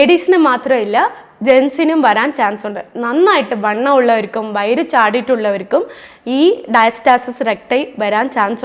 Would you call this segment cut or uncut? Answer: uncut